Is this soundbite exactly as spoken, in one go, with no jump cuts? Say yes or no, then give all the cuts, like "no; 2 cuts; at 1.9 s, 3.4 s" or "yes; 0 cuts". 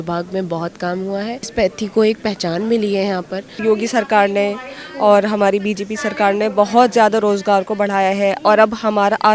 no; 2 cuts; at 1.5 s, 3.4 s